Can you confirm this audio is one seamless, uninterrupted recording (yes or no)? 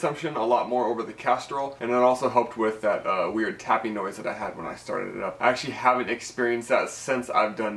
no